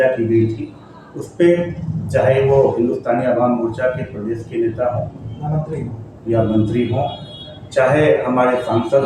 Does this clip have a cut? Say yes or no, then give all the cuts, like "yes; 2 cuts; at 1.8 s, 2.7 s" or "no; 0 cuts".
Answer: no; 0 cuts